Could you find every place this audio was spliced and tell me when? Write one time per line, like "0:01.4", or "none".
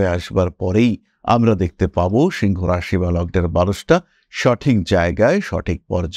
none